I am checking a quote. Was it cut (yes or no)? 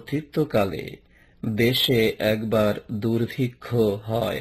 yes